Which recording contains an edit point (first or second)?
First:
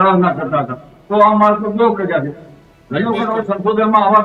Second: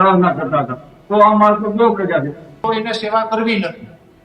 second